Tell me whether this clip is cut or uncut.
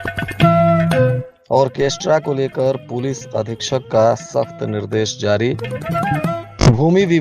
cut